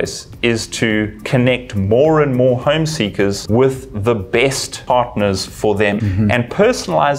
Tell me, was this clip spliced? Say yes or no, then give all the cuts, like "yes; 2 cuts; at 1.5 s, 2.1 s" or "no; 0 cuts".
yes; 3 cuts; at 3.4 s, 4.7 s, 6.1 s